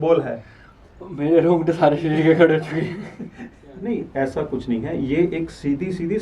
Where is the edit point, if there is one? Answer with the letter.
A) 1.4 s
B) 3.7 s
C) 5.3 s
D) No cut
B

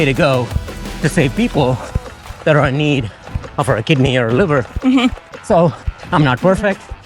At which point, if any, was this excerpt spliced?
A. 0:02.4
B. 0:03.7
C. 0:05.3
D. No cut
C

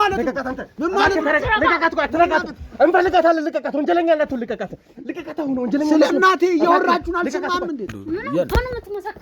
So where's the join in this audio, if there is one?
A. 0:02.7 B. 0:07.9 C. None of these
B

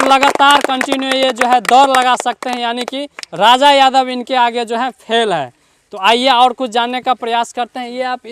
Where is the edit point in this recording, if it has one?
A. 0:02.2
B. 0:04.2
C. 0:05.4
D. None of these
D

